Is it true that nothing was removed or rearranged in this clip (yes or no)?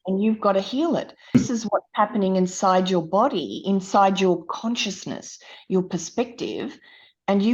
no